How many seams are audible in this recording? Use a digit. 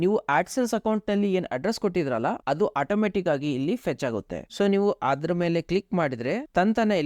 0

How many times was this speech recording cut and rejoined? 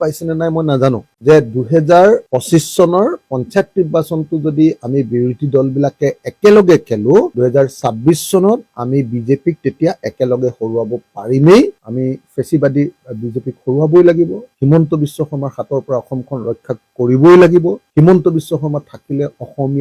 0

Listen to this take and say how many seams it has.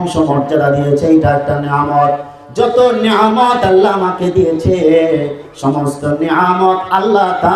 0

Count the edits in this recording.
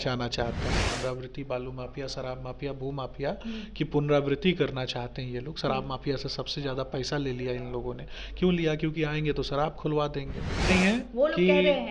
2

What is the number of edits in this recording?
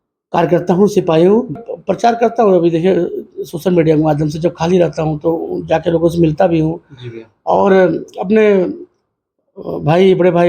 1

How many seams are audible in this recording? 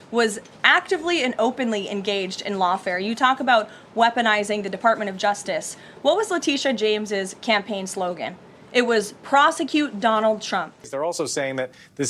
1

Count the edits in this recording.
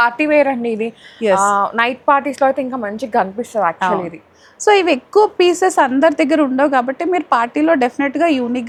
0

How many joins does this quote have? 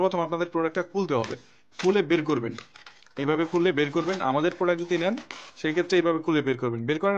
0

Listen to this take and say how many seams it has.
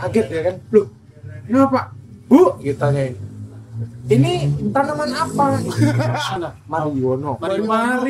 1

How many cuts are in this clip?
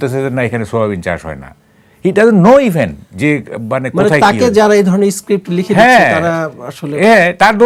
0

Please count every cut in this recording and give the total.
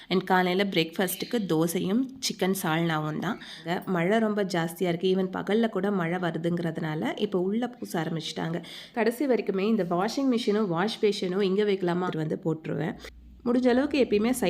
2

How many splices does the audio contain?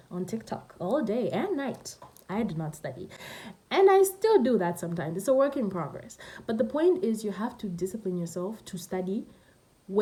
0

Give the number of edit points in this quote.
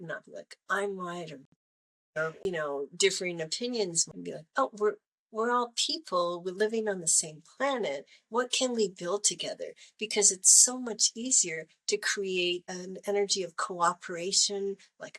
2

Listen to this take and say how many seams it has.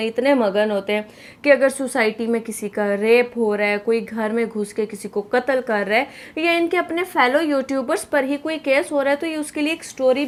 0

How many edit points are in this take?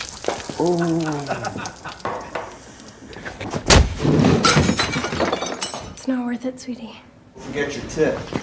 1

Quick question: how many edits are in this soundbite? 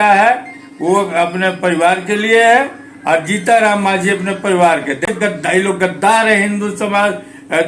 1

